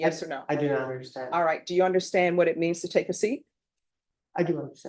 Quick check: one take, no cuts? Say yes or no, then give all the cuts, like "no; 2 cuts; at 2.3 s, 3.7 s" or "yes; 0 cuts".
yes; 0 cuts